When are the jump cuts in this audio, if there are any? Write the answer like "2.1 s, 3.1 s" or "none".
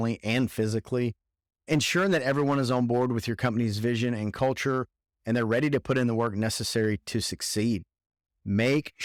none